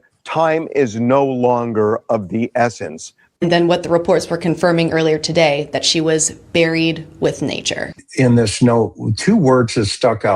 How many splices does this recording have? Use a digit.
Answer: 2